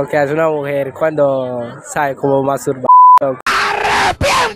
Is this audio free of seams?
yes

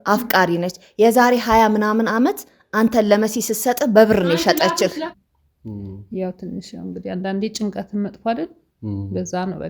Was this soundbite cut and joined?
yes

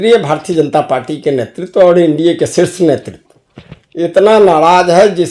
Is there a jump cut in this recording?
no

